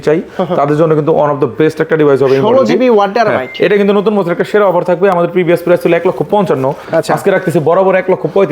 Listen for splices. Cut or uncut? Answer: uncut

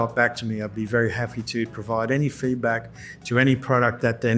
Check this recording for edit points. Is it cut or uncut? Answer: uncut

